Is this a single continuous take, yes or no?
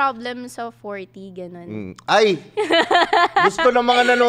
yes